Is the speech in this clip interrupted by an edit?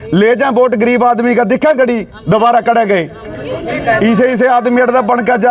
no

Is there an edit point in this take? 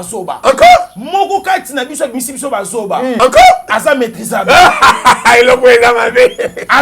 yes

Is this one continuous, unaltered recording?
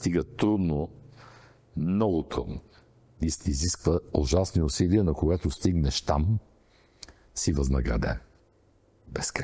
yes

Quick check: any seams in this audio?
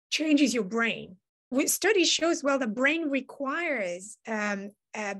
yes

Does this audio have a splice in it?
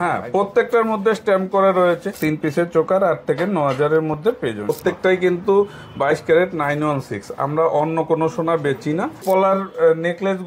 yes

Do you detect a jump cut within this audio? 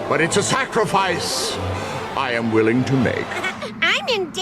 yes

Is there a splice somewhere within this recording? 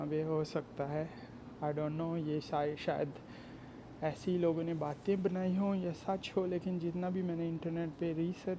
no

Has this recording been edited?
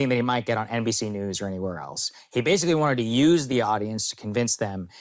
no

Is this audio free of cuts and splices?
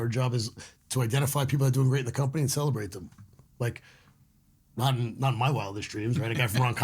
yes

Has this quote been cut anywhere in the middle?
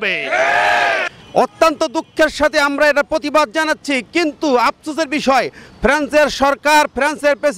yes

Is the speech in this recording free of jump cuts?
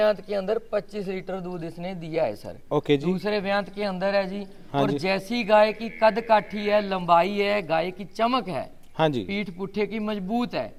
yes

